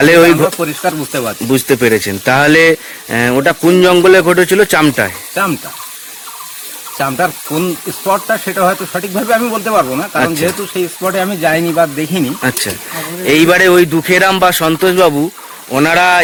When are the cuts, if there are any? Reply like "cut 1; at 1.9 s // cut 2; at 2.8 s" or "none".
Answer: none